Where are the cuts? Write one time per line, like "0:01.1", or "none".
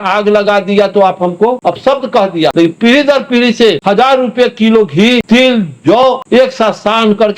0:01.6
0:02.5
0:03.8
0:05.2
0:06.1